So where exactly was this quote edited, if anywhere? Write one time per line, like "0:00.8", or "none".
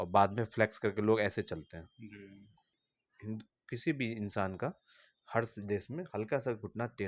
0:02.8